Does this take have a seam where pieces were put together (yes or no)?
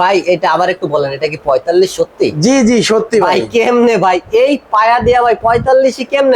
no